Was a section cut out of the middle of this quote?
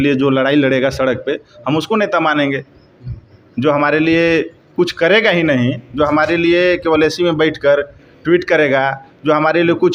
no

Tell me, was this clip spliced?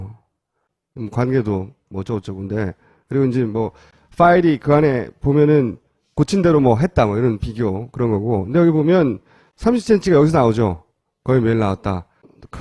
no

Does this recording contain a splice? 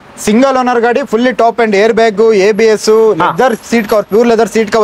no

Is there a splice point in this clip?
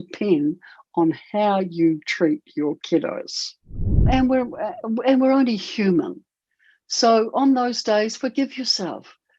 yes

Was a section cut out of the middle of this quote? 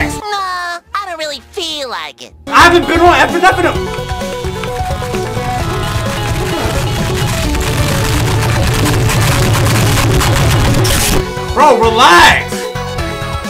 no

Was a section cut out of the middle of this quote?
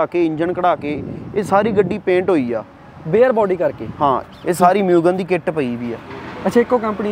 yes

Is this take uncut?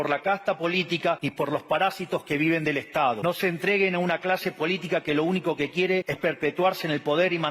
no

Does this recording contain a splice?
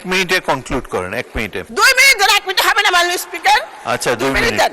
yes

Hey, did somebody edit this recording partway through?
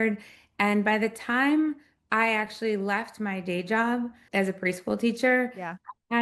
no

